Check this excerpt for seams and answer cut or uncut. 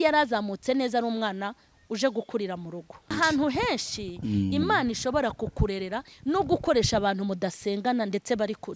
cut